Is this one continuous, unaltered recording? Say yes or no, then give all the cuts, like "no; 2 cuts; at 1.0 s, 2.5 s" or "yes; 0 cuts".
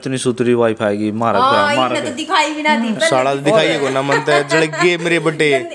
yes; 0 cuts